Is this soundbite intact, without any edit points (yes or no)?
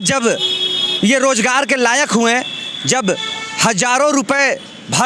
yes